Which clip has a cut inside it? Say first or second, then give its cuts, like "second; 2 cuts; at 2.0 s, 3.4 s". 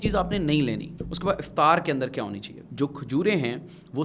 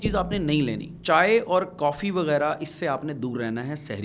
first; 2 cuts; at 0.9 s, 2.6 s